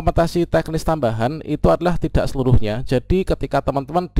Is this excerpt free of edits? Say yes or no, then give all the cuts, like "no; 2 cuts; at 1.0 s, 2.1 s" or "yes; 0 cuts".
yes; 0 cuts